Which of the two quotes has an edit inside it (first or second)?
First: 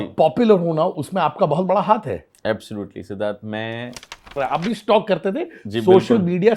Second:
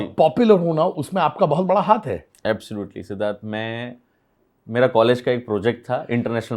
first